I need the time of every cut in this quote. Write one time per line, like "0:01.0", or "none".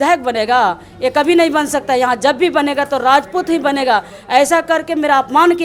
none